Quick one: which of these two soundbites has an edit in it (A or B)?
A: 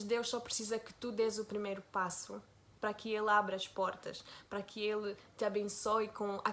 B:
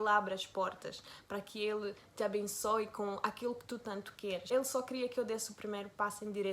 B